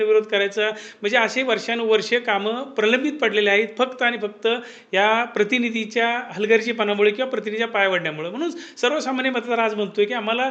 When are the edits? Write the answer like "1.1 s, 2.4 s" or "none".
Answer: none